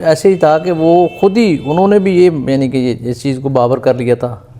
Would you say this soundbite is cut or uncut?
uncut